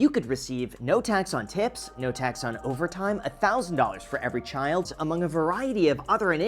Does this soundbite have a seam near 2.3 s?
no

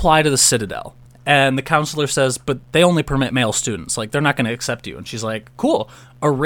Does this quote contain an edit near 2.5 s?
yes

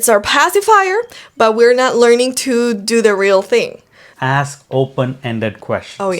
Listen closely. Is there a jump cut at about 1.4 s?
no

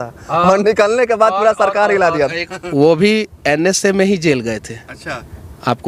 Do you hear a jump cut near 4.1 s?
no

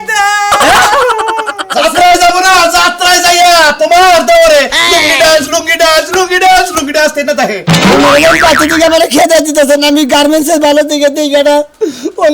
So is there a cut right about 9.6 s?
no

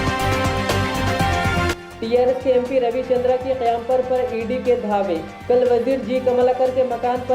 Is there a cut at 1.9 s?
yes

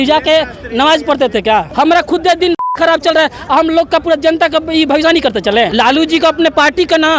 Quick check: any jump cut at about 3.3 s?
no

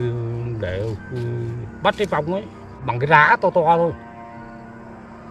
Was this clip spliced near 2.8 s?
yes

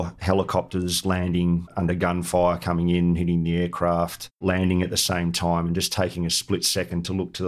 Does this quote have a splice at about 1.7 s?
yes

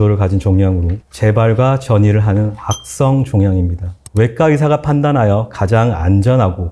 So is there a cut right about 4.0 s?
yes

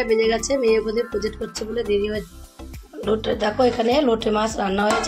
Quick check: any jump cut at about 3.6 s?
no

